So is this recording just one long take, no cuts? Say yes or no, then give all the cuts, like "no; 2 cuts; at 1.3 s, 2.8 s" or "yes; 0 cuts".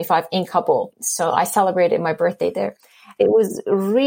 no; 2 cuts; at 1.0 s, 3.1 s